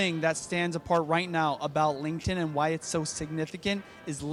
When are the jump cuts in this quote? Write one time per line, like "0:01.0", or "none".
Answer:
none